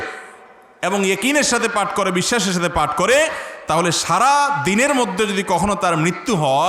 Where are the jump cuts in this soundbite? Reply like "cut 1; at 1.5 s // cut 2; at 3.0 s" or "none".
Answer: none